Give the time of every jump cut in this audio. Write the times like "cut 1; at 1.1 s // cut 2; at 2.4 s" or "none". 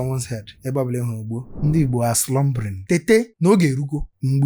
cut 1; at 1.5 s // cut 2; at 2.8 s

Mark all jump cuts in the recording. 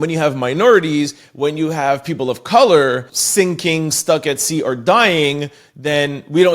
cut 1; at 3.2 s

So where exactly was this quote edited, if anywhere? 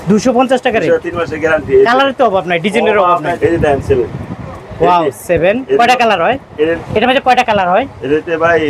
cut 1; at 3.4 s // cut 2; at 6.8 s

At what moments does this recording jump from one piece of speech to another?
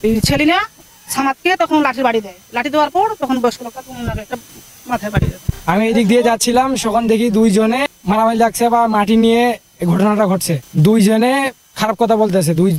none

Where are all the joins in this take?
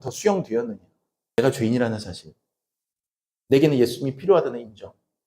cut 1; at 1.4 s

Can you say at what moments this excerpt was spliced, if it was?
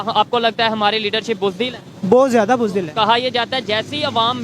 cut 1; at 1.9 s

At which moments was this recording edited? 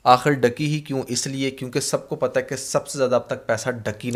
none

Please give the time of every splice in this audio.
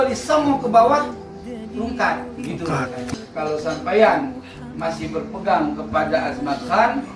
cut 1; at 3.1 s

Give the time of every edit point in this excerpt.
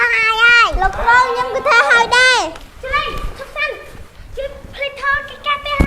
cut 1; at 2.7 s

